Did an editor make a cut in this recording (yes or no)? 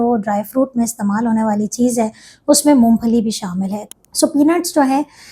yes